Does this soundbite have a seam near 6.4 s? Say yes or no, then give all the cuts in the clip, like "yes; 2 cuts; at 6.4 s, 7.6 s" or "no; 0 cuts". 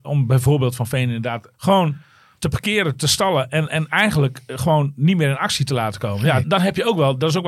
yes; 2 cuts; at 1.4 s, 6.4 s